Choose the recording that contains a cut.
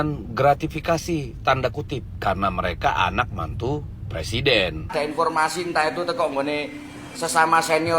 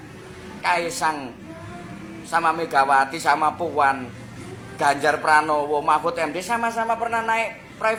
first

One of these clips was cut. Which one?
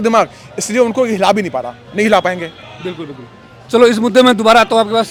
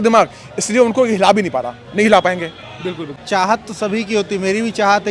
second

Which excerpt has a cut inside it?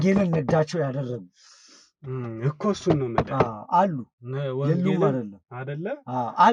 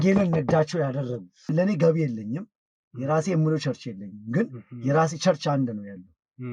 second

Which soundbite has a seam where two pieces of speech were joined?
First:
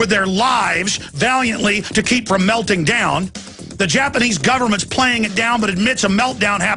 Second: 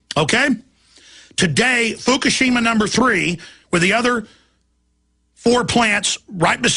second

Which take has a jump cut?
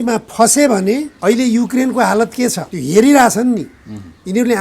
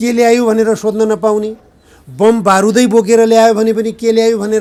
first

